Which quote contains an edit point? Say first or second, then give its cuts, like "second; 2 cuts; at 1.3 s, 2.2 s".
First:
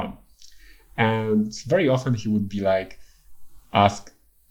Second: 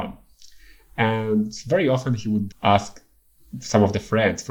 second; 1 cut; at 2.5 s